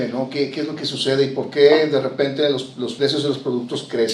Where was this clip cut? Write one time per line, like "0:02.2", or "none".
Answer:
0:02.9